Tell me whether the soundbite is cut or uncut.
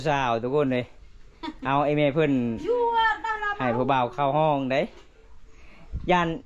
uncut